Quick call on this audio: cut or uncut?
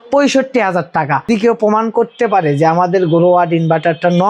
cut